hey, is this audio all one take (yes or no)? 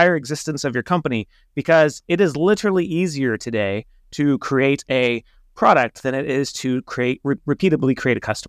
no